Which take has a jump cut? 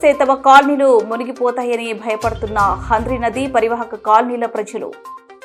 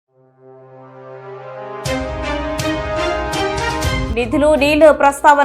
second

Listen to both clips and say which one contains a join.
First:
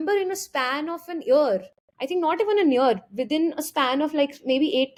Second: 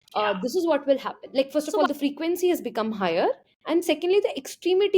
second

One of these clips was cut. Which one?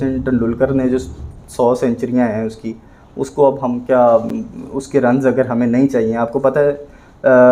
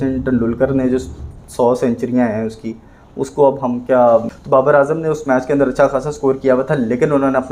second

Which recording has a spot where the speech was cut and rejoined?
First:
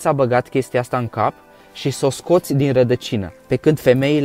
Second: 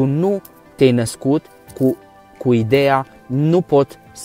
first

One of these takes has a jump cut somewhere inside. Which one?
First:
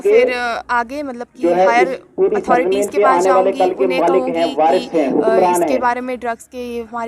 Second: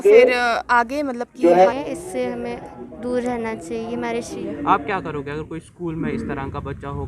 second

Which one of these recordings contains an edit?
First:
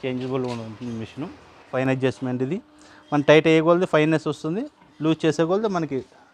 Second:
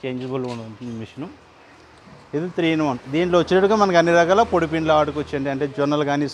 first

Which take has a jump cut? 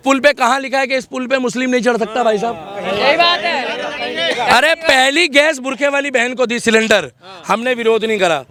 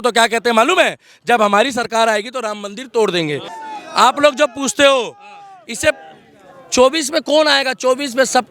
second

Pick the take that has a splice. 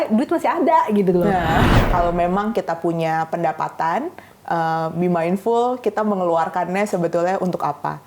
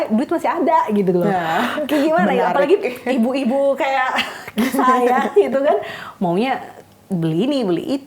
first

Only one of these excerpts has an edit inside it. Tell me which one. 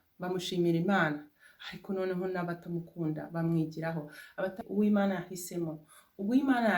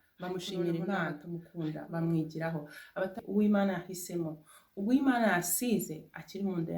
second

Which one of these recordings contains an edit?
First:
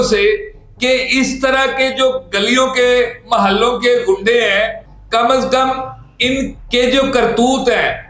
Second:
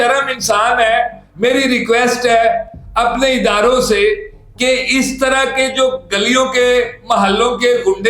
second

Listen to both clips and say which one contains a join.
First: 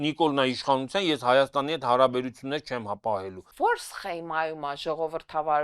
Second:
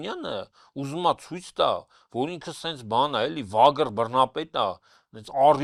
first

